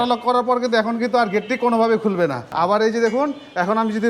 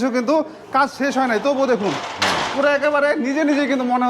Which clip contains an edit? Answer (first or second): first